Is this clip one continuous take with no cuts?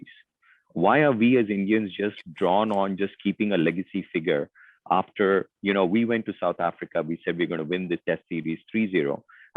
yes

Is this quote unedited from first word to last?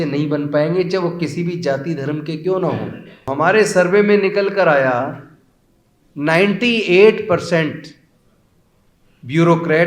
no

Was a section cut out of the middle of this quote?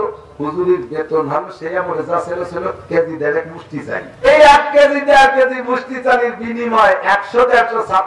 yes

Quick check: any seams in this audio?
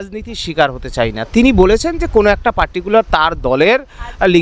no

